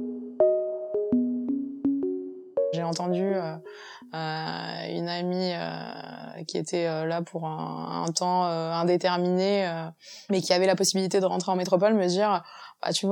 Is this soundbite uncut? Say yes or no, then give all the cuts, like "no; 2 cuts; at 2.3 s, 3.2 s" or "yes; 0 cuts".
no; 1 cut; at 2.8 s